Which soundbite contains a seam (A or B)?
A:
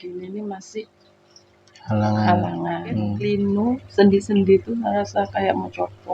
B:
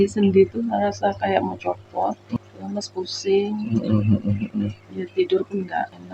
A